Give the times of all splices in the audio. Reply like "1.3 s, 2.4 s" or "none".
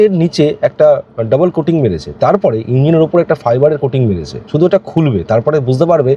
4.3 s

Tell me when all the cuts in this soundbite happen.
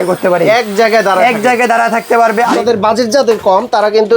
2.5 s

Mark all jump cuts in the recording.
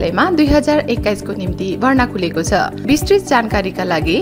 2.8 s

